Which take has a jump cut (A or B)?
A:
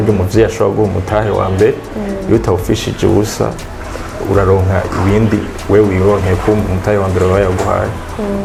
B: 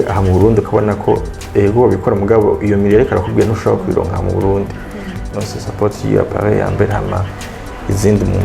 B